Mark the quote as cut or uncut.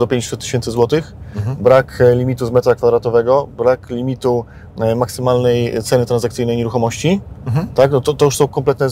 uncut